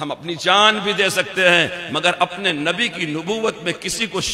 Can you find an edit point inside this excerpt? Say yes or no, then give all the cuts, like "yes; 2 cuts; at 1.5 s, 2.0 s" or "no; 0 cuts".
no; 0 cuts